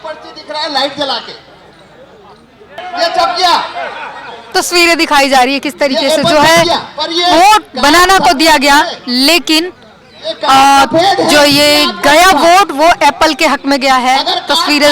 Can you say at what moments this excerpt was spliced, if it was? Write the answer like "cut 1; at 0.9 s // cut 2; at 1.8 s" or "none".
cut 1; at 2.8 s